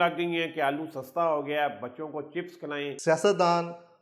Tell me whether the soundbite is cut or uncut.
cut